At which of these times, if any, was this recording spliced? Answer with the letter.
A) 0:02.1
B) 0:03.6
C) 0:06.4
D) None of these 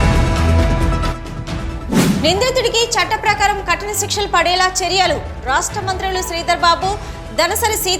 A